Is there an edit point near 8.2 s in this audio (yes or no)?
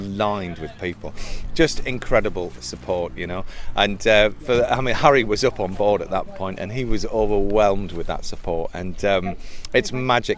no